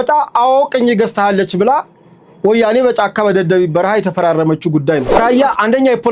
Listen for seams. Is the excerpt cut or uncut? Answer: cut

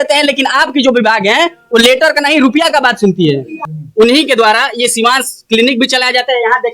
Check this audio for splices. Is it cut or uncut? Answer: cut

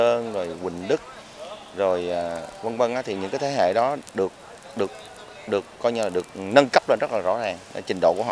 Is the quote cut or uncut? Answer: uncut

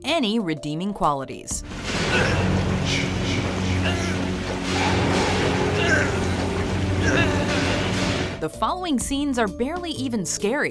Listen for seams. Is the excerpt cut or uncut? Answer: cut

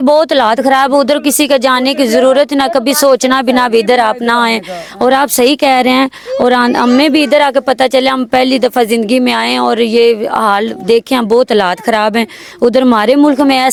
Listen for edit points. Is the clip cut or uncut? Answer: uncut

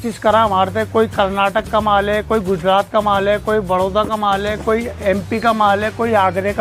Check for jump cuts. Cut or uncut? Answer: uncut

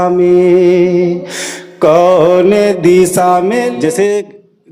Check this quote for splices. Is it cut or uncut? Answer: cut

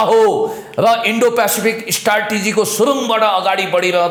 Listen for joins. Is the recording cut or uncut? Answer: uncut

